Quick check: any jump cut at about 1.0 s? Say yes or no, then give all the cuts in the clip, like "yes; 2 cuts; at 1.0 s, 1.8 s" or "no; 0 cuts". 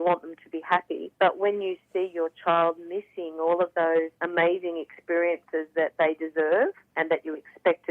yes; 3 cuts; at 1.0 s, 4.2 s, 6.8 s